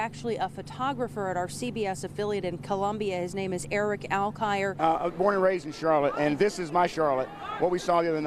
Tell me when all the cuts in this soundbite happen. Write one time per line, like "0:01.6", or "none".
0:04.8